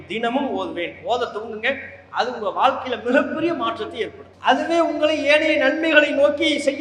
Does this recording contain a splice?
no; 0 cuts

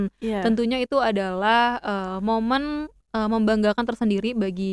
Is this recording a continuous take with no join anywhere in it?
yes; 0 cuts

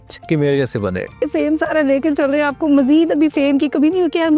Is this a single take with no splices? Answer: no; 1 cut; at 1.2 s

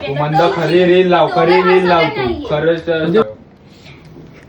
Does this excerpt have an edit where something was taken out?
yes; 1 cut; at 3.2 s

